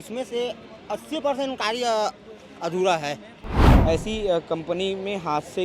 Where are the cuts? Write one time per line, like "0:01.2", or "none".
0:03.7